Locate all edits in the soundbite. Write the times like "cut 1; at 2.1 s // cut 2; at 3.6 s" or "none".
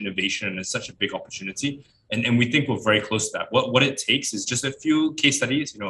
cut 1; at 1.9 s